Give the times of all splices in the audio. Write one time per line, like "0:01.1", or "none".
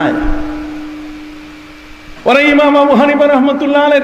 none